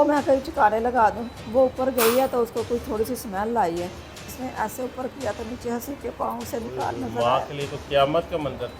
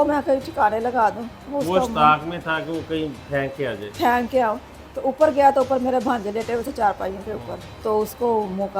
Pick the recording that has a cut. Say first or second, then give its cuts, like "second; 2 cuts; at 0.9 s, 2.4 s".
first; 2 cuts; at 1.3 s, 4.3 s